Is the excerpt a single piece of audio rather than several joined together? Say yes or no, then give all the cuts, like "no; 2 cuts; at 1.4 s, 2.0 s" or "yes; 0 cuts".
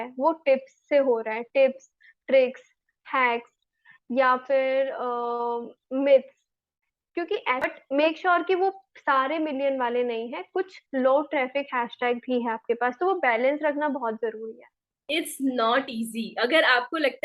no; 2 cuts; at 7.6 s, 14.9 s